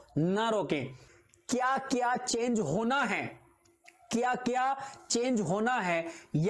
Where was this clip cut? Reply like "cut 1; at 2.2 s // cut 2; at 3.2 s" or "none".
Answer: cut 1; at 1.0 s